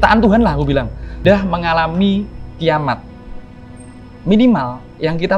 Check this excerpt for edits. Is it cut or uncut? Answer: cut